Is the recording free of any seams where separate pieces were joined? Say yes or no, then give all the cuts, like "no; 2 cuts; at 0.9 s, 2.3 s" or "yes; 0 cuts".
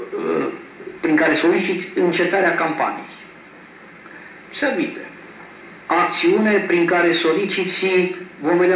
yes; 0 cuts